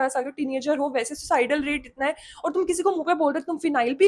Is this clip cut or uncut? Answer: uncut